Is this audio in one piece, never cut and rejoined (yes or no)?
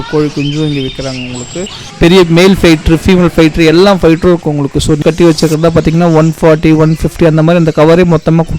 no